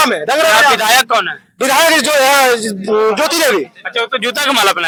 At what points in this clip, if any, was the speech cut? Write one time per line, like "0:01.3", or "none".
none